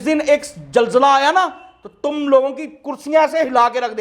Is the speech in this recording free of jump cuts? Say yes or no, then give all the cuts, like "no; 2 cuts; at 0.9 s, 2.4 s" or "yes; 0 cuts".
yes; 0 cuts